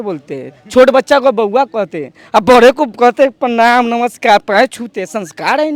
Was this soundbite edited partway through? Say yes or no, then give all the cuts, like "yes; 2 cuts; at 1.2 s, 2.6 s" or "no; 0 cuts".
no; 0 cuts